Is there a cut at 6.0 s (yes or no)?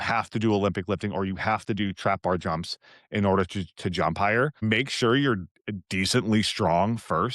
no